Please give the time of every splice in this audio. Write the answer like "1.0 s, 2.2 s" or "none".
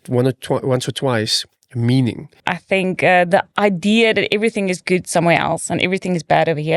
2.4 s